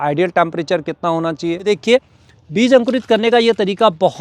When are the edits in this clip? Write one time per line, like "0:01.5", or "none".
0:01.6